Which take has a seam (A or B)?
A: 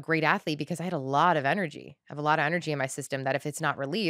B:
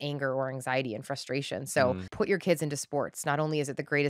B